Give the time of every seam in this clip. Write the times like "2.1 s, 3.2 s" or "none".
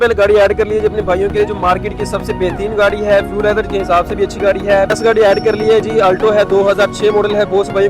4.9 s

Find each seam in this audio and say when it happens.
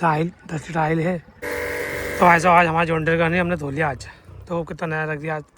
1.3 s

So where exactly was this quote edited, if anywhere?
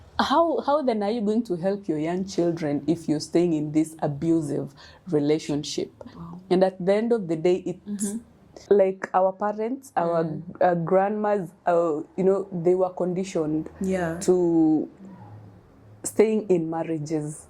8.5 s

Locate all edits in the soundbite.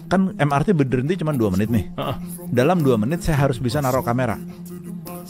none

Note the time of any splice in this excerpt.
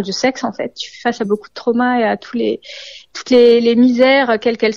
none

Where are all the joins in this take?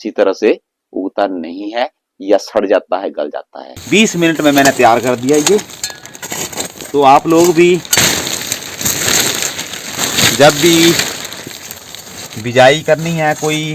3.8 s

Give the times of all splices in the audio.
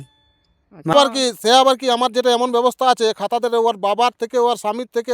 0.9 s

